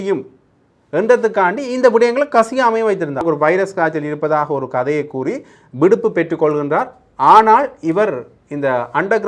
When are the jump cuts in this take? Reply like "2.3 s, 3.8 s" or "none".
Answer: 3.2 s